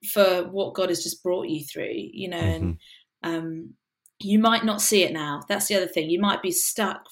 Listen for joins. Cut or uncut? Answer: uncut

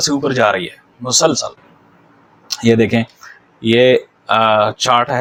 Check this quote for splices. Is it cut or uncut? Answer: uncut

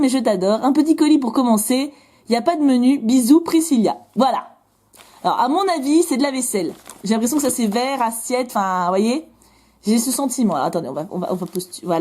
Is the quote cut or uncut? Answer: cut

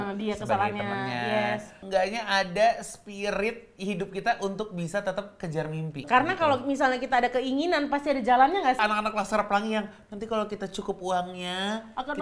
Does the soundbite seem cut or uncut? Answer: cut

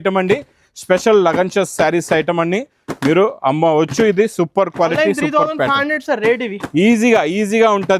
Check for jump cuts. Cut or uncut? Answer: uncut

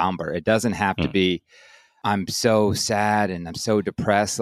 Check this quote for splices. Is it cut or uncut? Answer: cut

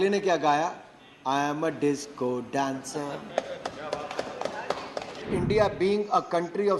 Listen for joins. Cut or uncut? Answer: cut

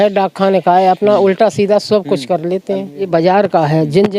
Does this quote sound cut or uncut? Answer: cut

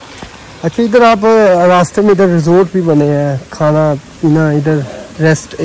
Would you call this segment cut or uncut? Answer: uncut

